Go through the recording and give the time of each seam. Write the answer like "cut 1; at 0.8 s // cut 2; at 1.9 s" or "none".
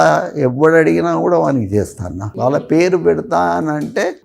cut 1; at 2.7 s